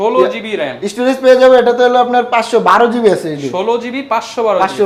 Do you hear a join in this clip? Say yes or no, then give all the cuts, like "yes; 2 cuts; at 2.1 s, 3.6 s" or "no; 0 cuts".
no; 0 cuts